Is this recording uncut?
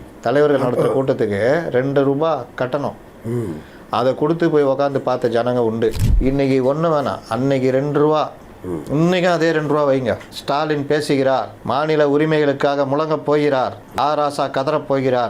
no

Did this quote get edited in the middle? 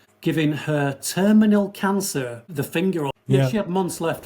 yes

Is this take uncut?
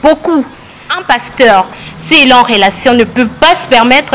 no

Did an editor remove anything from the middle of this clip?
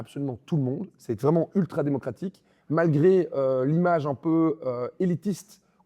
no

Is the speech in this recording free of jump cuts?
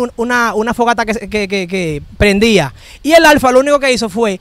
yes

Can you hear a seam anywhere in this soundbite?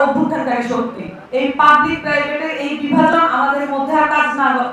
yes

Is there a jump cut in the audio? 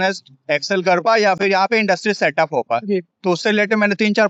no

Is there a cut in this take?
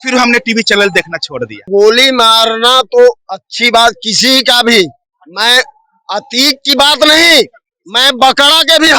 yes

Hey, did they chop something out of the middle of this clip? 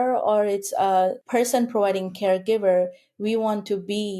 yes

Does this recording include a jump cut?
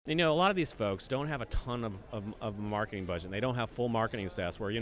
yes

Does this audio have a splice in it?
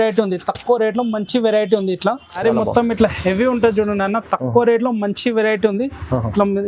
yes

